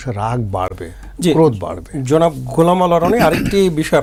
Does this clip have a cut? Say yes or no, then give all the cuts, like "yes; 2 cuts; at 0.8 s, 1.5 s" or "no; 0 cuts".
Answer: no; 0 cuts